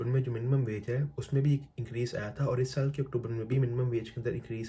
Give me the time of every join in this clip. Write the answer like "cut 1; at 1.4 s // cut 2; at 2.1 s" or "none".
none